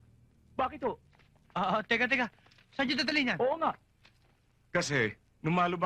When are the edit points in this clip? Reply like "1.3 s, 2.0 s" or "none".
none